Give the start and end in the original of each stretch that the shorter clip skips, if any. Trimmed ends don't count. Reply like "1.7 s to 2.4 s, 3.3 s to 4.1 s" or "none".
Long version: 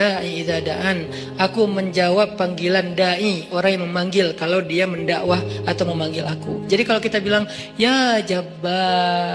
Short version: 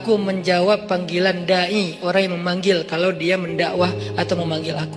none